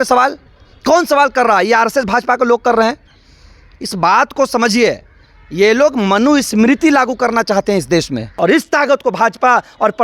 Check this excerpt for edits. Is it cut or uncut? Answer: cut